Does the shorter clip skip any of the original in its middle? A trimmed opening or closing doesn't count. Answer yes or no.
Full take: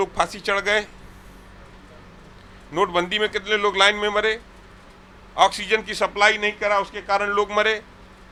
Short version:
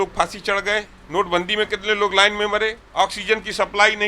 yes